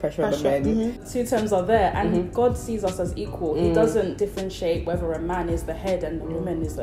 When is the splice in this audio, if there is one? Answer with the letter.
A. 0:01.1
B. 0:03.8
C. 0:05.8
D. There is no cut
A